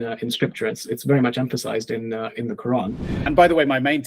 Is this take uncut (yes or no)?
no